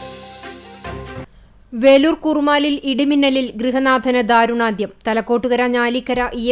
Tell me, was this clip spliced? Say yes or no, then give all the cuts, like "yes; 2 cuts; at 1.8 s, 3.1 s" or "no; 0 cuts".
yes; 1 cut; at 1.0 s